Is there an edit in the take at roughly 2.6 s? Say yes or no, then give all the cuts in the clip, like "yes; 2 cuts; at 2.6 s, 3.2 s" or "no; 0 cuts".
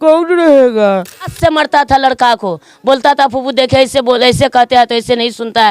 no; 1 cut; at 1.3 s